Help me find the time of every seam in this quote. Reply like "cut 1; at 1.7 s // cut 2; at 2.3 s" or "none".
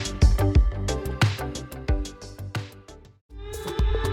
cut 1; at 3.0 s